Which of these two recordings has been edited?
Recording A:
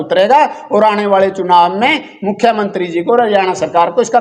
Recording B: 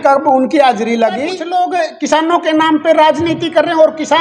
B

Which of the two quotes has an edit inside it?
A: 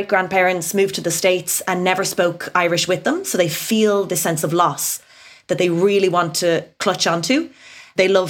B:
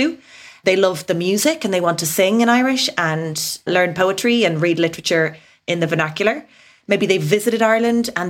B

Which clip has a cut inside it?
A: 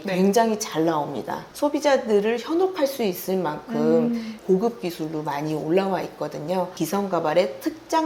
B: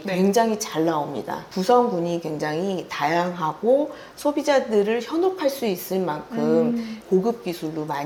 A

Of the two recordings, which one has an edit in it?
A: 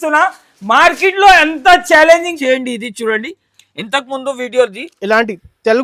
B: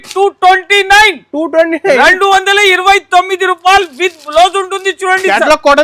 A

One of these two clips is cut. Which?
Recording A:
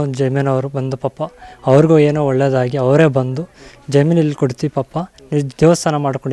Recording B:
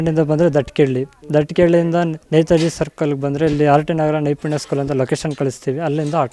B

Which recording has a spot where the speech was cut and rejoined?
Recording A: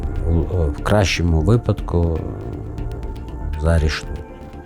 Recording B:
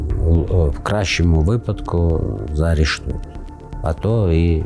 B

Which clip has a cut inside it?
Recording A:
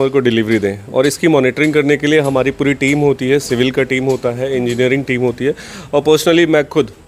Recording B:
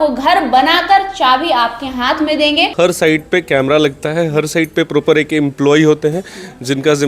B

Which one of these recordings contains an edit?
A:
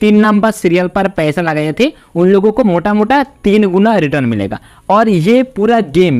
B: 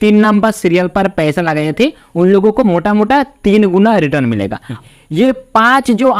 B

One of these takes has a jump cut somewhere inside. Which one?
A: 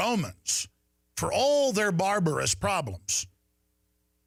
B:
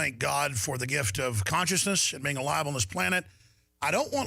B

